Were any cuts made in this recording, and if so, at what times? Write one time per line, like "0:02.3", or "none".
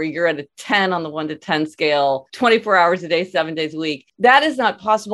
0:02.3
0:04.0